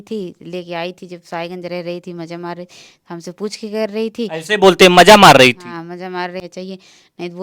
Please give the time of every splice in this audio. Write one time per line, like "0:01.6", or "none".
0:06.4

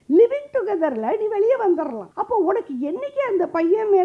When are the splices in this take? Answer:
0:02.1

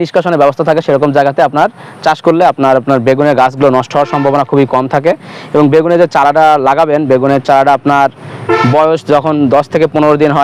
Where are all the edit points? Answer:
none

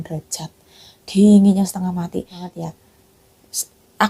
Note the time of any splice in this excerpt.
0:02.4

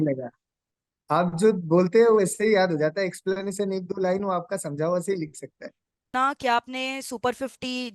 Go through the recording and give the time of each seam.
0:06.1

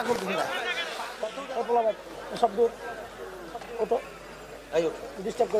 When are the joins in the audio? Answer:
0:01.0

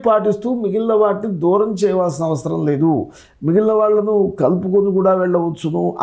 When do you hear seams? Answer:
none

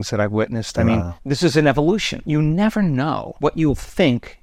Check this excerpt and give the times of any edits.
0:01.1
0:02.2
0:03.3

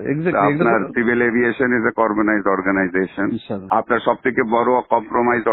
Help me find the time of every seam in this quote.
0:03.5

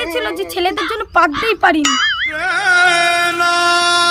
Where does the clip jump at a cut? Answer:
none

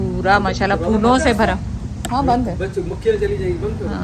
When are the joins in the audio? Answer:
none

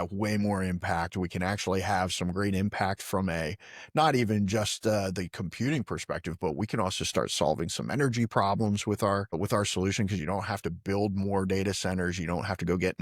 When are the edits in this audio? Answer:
none

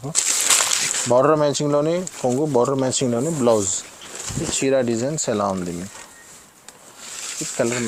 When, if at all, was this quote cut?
none

